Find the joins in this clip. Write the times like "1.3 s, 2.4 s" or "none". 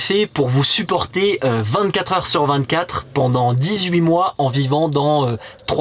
none